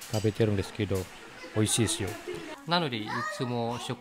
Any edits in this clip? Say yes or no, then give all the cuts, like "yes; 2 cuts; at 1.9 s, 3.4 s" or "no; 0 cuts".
yes; 1 cut; at 2.5 s